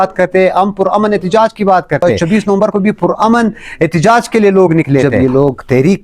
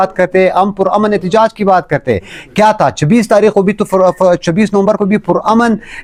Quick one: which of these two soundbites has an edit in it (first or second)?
first